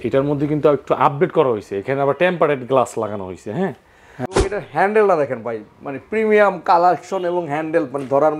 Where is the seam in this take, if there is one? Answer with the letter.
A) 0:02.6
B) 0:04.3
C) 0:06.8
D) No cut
B